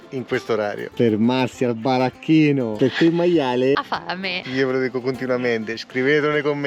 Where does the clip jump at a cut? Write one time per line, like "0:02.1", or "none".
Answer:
0:04.4